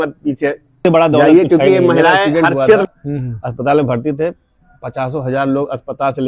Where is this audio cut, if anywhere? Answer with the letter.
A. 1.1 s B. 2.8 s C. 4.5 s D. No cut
B